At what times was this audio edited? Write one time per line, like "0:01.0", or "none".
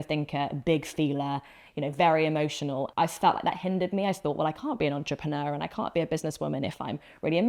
0:02.9